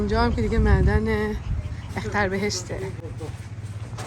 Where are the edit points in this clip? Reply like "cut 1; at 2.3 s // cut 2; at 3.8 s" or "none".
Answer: none